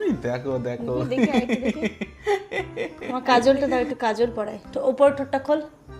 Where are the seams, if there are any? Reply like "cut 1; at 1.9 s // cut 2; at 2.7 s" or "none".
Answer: cut 1; at 3.0 s